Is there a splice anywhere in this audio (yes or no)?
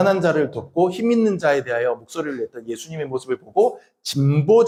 no